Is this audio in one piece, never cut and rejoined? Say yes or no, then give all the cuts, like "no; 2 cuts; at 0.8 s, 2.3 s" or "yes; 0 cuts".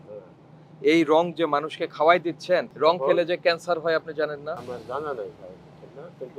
no; 1 cut; at 4.6 s